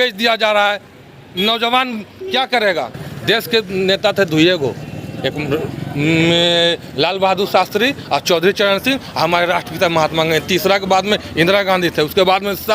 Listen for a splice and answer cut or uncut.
cut